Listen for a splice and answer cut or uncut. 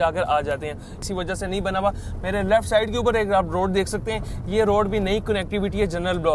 cut